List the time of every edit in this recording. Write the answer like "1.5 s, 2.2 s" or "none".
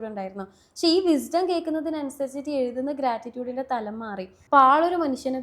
4.3 s